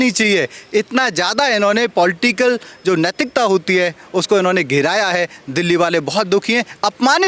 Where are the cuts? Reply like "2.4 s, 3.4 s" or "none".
none